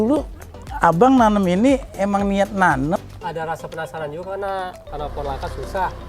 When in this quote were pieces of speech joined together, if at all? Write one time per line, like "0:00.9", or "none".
0:03.0
0:04.8